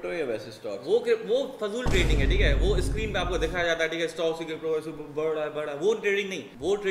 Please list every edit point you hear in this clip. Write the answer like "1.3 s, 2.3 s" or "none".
none